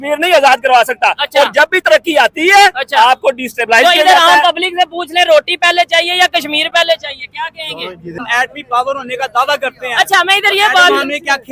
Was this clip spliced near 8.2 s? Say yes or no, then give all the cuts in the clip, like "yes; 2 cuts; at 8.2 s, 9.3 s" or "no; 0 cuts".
yes; 1 cut; at 8.2 s